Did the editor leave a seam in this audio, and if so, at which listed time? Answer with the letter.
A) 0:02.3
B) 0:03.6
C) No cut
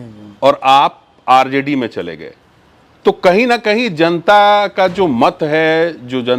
C